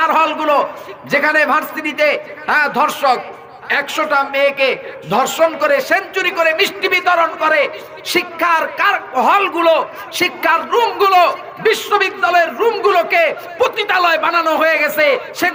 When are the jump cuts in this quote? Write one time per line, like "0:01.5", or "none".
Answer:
none